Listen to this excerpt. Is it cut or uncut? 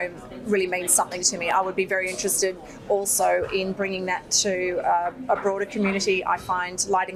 uncut